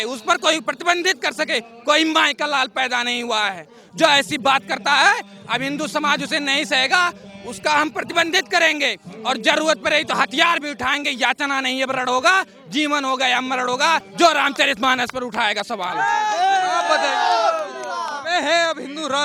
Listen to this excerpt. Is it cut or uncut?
uncut